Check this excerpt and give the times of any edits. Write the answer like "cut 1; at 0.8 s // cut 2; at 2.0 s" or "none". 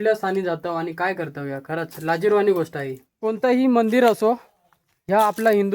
cut 1; at 3.4 s